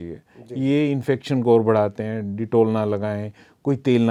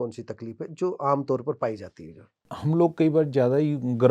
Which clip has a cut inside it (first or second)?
second